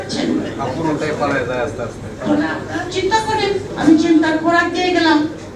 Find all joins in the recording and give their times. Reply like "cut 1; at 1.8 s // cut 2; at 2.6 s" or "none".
none